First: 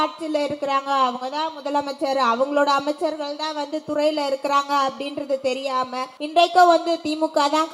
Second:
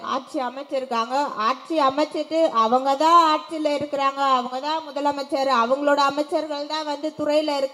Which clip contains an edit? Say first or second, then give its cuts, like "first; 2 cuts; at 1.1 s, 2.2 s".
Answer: first; 1 cut; at 6.1 s